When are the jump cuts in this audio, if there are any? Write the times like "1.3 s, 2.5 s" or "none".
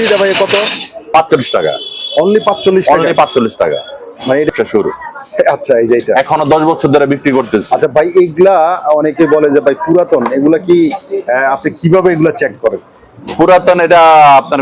4.5 s